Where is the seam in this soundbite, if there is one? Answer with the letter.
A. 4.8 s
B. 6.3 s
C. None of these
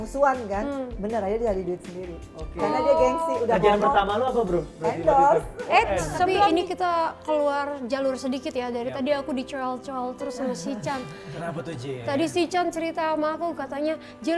B